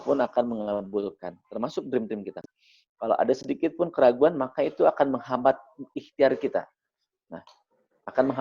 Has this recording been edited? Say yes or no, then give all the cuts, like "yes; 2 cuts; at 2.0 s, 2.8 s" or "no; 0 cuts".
yes; 1 cut; at 2.4 s